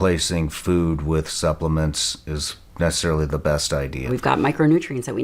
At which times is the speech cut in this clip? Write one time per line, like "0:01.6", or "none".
0:04.1